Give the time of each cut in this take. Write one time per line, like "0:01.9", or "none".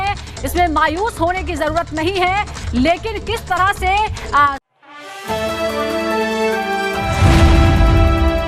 0:04.8